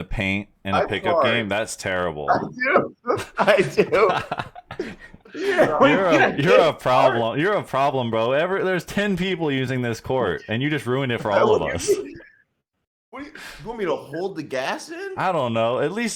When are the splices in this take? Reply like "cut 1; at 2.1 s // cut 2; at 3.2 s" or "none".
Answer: none